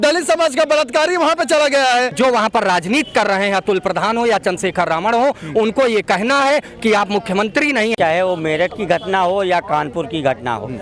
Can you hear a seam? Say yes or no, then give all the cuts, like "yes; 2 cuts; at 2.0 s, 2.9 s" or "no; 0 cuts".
yes; 2 cuts; at 2.1 s, 7.9 s